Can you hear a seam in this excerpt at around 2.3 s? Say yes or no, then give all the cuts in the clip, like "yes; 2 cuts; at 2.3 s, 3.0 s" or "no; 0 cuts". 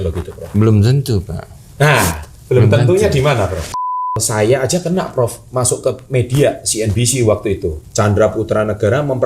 no; 2 cuts; at 4.2 s, 7.8 s